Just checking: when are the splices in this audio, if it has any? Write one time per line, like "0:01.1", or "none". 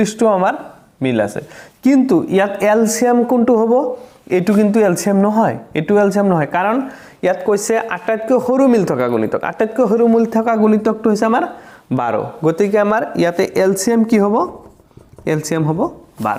none